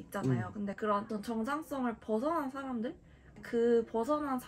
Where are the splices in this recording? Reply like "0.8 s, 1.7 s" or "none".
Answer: 3.4 s